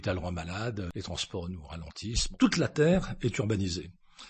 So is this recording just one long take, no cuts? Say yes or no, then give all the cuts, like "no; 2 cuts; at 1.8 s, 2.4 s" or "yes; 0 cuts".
no; 2 cuts; at 0.9 s, 2.3 s